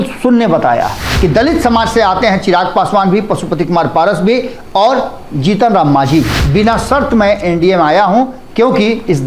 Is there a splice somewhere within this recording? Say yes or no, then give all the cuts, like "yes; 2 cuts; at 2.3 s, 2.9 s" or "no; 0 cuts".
yes; 2 cuts; at 1.1 s, 6.4 s